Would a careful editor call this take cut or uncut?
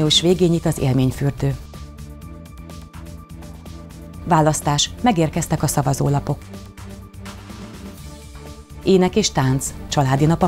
uncut